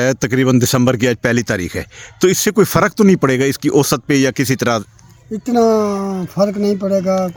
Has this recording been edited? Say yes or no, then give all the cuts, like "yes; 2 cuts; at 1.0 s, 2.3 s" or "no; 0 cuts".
no; 0 cuts